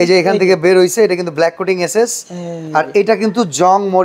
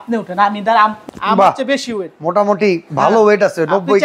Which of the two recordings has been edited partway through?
second; 1 cut; at 1.0 s

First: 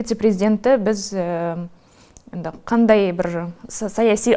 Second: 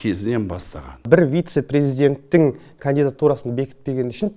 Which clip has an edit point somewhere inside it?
second; 1 cut; at 1.1 s

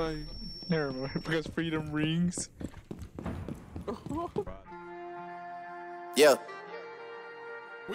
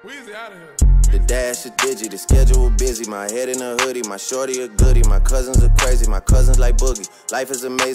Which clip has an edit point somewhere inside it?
first; 1 cut; at 4.6 s

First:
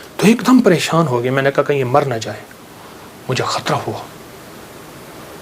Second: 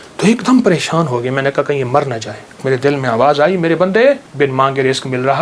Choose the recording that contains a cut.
second; 2 cuts; at 2.6 s, 4.3 s

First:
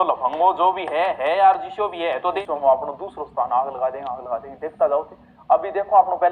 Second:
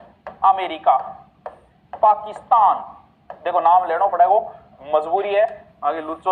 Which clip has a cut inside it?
first; 1 cut; at 2.4 s

